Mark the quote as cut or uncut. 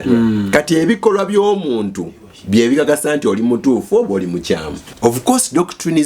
cut